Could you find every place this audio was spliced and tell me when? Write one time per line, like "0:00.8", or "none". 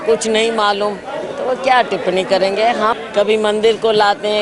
0:03.0